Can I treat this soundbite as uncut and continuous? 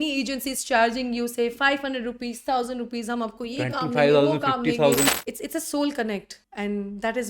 no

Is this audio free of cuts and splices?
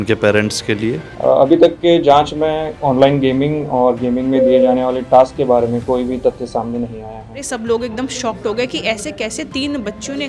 no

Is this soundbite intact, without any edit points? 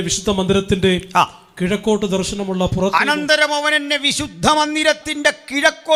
yes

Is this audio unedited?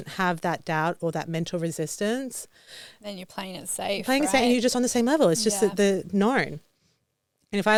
yes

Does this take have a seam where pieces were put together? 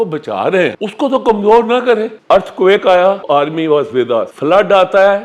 yes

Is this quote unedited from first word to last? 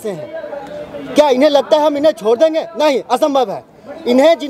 yes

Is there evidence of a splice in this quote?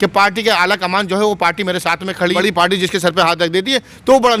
yes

